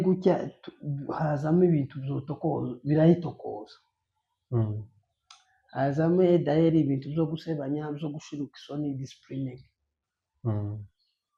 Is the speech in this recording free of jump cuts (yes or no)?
yes